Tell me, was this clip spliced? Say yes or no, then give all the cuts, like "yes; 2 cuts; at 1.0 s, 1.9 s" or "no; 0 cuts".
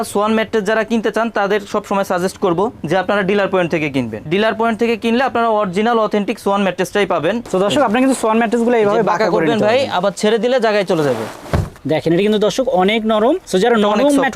yes; 3 cuts; at 4.2 s, 7.4 s, 11.8 s